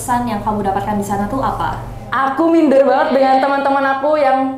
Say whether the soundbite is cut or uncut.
cut